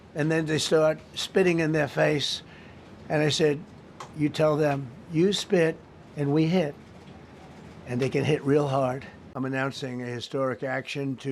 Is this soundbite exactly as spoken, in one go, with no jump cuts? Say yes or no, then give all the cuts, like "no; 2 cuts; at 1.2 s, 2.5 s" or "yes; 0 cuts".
no; 1 cut; at 9.2 s